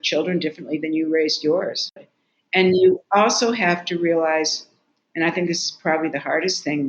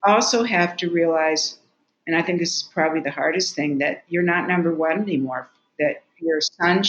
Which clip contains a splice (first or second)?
first